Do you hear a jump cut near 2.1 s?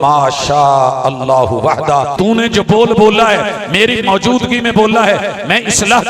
yes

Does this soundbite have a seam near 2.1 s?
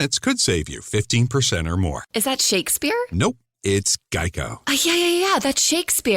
yes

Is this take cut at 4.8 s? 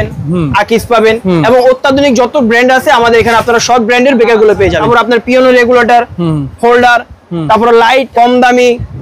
yes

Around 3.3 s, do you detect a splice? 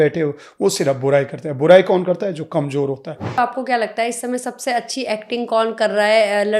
yes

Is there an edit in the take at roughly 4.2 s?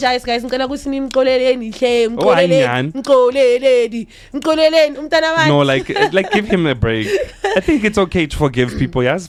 no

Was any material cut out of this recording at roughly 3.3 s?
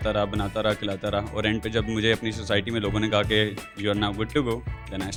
no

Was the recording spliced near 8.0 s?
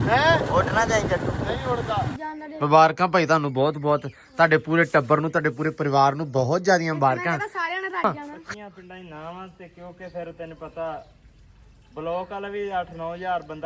yes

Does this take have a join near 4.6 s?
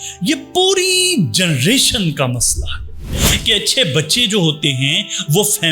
no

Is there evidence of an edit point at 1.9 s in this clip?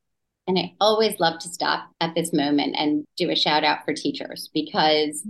yes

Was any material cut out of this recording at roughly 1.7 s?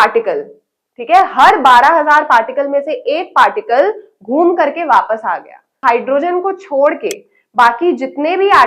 no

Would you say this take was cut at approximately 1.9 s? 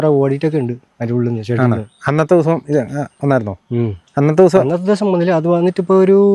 no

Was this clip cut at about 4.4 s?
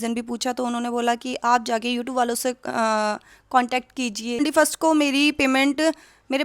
yes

